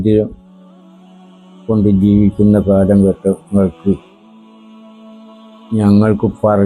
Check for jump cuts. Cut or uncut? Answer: uncut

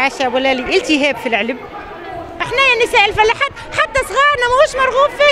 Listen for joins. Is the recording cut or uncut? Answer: cut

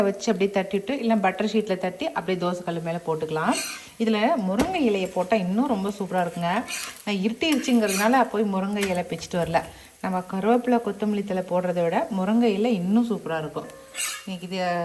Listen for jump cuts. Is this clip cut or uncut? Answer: uncut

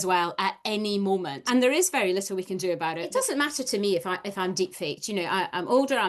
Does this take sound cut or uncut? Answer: cut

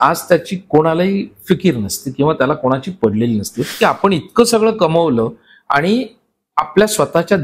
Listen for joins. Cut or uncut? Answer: cut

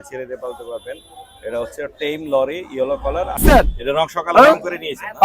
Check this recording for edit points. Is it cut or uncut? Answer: cut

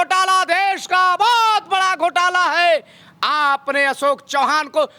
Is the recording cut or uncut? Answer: uncut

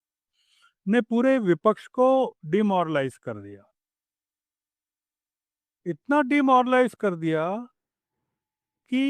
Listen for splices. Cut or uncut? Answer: uncut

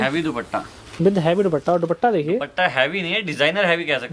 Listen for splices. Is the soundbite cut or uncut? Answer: uncut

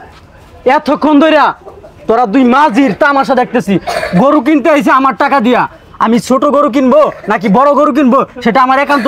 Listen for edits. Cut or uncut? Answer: uncut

